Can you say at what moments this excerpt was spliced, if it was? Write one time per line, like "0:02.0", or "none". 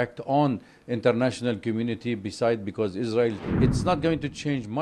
0:03.4